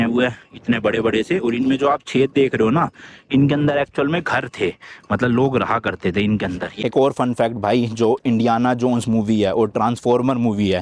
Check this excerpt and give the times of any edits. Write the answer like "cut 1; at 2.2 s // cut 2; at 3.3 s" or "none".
cut 1; at 6.8 s